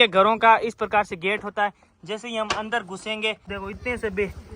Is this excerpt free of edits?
no; 1 cut; at 3.5 s

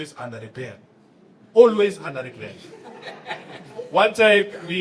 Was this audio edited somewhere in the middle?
no; 0 cuts

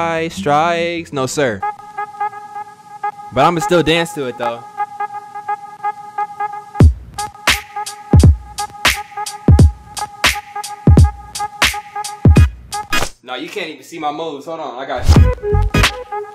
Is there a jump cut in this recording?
yes; 1 cut; at 15.1 s

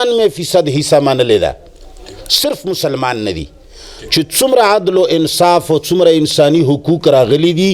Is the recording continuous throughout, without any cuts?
yes; 0 cuts

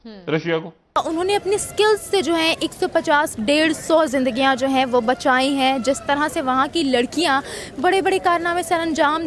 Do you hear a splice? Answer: yes; 1 cut; at 1.0 s

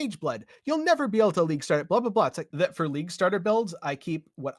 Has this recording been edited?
yes; 1 cut; at 2.4 s

